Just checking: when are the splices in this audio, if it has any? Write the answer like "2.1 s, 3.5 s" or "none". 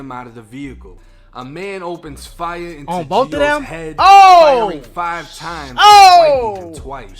1.0 s